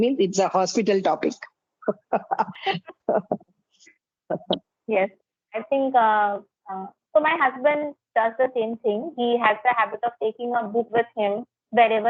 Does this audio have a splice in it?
no; 0 cuts

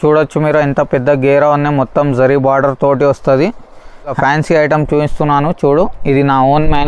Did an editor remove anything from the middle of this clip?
yes; 1 cut; at 4.2 s

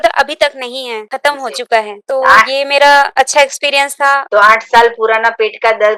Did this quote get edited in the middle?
yes; 4 cuts; at 1.0 s, 2.0 s, 3.1 s, 4.2 s

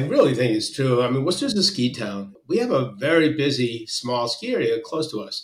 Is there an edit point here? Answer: yes; 1 cut; at 2.3 s

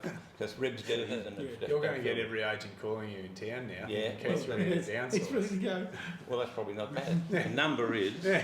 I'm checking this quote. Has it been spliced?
yes; 1 cut; at 1.2 s

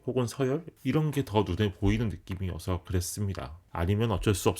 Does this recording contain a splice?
yes; 1 cut; at 3.6 s

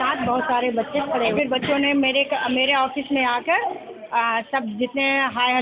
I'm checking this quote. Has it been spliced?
no; 0 cuts

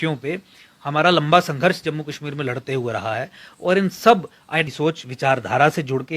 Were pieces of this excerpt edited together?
yes; 1 cut; at 4.7 s

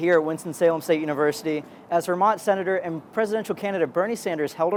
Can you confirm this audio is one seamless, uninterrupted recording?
yes; 0 cuts

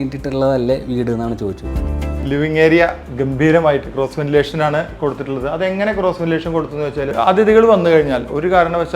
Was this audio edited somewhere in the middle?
yes; 2 cuts; at 1.7 s, 7.1 s

